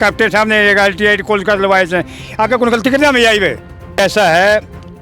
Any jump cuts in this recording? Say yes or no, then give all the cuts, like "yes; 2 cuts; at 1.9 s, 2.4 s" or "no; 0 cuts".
yes; 1 cut; at 4.0 s